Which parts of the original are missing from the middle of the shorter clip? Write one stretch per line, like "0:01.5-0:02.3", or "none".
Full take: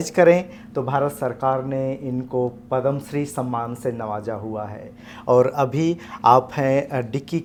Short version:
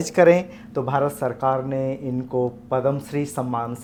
none